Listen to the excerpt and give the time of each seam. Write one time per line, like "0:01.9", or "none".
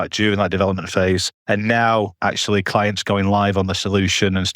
0:01.3